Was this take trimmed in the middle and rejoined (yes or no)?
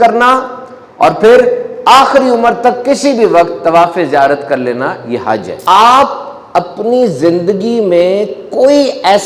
yes